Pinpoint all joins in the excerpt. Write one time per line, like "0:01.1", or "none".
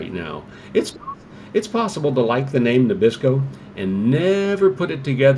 none